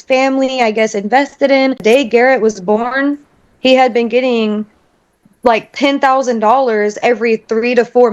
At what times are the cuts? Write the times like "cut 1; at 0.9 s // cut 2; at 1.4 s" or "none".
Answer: cut 1; at 1.8 s